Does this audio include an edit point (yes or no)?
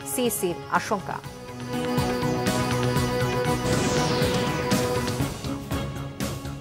yes